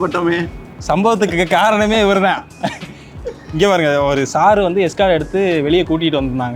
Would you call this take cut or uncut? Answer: uncut